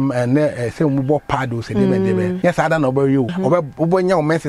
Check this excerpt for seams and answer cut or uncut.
cut